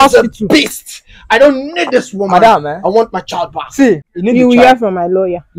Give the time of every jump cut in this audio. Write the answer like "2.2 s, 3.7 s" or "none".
4.1 s